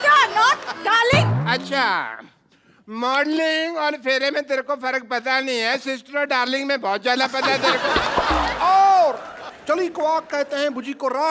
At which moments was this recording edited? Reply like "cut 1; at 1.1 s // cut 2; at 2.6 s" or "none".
cut 1; at 8.5 s

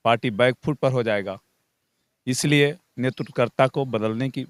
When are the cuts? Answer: none

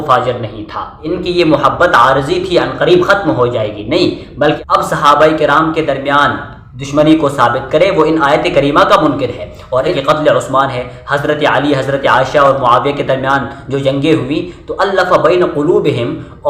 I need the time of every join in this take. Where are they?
cut 1; at 0.9 s // cut 2; at 4.6 s // cut 3; at 9.9 s

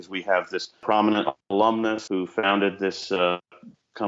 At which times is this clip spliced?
cut 1; at 0.8 s // cut 2; at 2.0 s

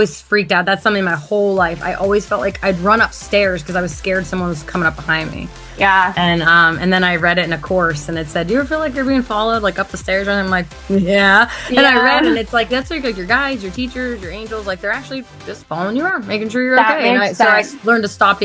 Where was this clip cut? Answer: none

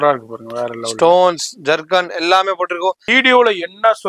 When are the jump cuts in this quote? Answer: cut 1; at 3.1 s

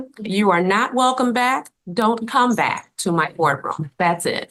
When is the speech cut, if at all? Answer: none

